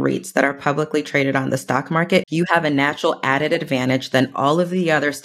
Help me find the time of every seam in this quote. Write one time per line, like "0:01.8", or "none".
0:02.3

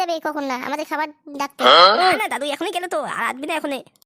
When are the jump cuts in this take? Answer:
0:01.5
0:02.2

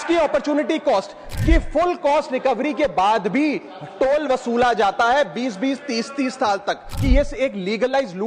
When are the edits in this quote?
0:01.2
0:06.9

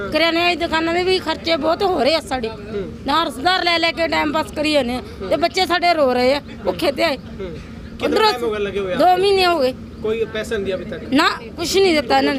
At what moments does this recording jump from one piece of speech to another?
none

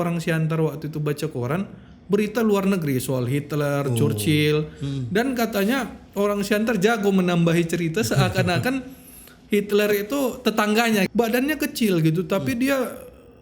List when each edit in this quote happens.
0:11.1

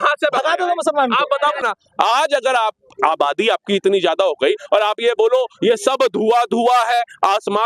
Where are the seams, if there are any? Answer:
0:01.6

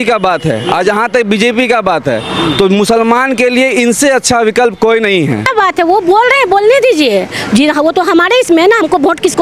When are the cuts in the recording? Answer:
0:05.5

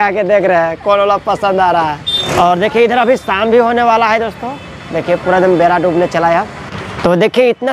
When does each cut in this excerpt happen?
none

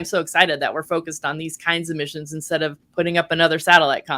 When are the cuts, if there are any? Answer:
0:02.8

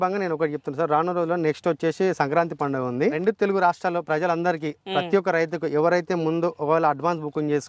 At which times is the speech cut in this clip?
0:03.2

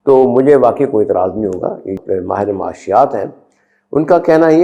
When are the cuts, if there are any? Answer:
0:01.9

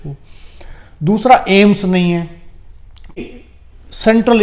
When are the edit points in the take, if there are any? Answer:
0:03.2

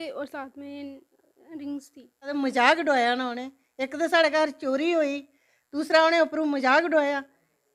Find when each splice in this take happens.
0:02.3

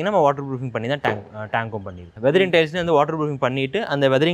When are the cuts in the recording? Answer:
0:02.1

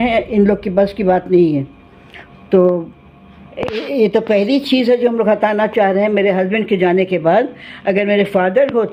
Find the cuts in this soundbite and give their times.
none

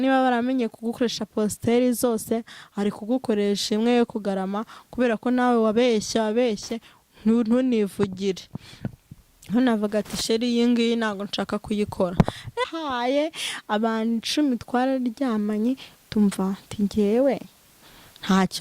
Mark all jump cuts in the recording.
0:12.6

